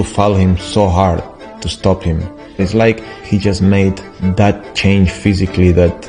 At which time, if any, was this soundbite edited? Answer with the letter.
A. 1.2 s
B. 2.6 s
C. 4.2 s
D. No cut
B